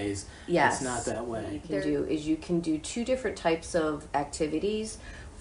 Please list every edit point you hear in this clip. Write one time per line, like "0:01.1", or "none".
0:01.6